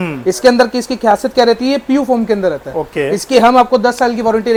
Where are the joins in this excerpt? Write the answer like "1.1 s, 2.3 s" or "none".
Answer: none